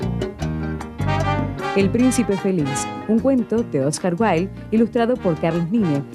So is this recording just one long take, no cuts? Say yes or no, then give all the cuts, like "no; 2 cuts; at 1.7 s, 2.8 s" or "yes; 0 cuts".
no; 1 cut; at 1.7 s